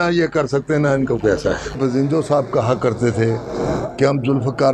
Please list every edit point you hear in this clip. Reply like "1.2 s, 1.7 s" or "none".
1.8 s